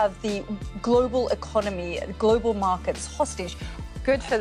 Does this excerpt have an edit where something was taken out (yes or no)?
no